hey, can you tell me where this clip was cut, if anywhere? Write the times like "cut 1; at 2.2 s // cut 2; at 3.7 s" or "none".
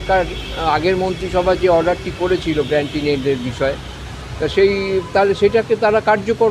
none